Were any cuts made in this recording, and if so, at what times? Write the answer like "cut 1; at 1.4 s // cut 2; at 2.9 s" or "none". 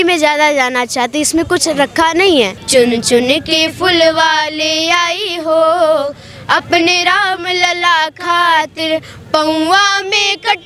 cut 1; at 2.6 s